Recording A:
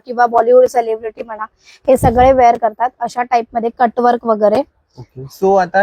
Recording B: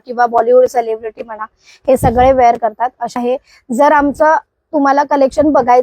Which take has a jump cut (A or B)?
B